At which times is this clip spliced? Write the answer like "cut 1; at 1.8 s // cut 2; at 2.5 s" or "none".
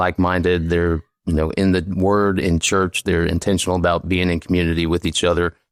none